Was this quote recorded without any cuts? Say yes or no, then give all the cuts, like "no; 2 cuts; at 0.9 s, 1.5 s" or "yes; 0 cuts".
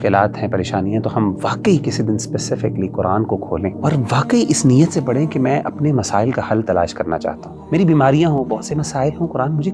no; 2 cuts; at 3.8 s, 7.5 s